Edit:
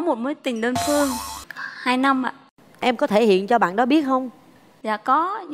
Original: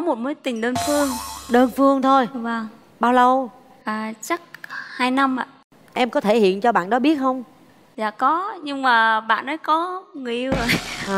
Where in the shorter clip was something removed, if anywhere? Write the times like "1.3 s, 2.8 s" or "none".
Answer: 1.4 s